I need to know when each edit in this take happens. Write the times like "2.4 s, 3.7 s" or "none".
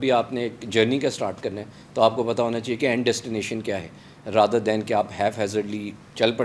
none